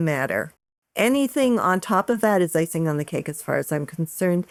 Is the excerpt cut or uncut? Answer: uncut